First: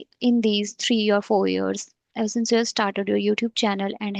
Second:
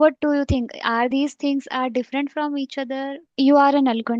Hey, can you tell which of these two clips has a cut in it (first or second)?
second